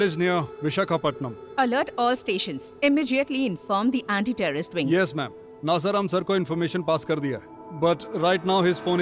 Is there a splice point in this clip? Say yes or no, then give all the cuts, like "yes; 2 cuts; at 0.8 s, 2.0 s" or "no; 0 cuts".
no; 0 cuts